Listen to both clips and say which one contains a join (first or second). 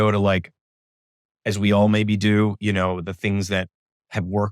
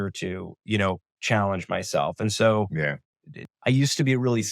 second